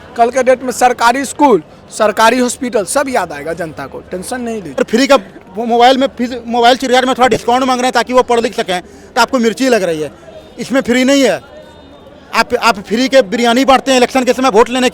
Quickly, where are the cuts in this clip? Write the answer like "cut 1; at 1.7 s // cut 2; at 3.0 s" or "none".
cut 1; at 4.8 s